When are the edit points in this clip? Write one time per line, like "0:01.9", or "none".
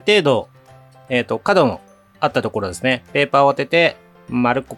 none

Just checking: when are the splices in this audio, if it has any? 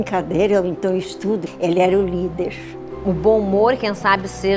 0:01.5
0:03.2

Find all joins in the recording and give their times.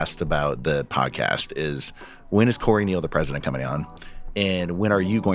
none

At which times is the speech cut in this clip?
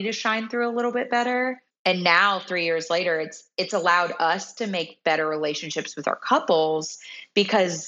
0:01.7

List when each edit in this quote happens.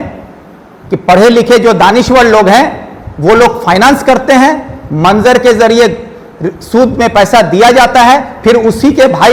none

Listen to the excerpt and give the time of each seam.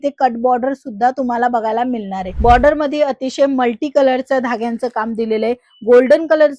0:02.3

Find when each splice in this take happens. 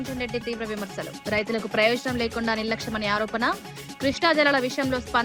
none

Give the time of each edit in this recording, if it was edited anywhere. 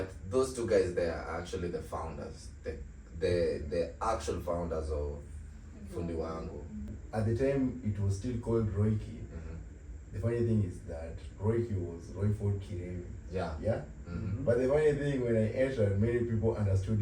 0:07.0

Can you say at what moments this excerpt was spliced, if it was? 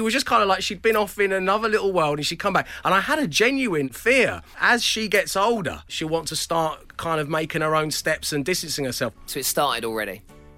0:04.2
0:05.9
0:09.3

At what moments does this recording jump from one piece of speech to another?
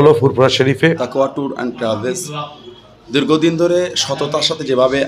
0:01.0

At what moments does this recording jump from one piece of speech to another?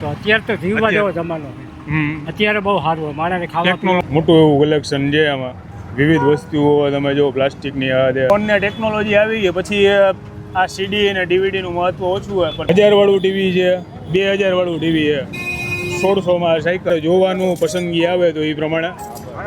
0:04.0
0:08.3
0:12.6
0:16.9

